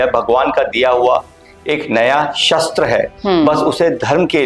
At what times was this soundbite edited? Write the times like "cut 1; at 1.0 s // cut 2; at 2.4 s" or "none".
none